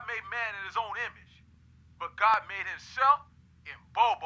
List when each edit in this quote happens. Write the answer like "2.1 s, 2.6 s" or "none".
none